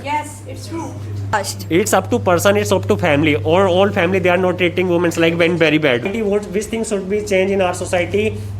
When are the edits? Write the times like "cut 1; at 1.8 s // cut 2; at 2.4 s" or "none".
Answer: cut 1; at 1.3 s // cut 2; at 6.1 s